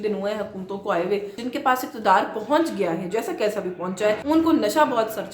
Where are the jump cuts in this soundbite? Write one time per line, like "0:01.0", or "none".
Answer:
0:01.4
0:04.2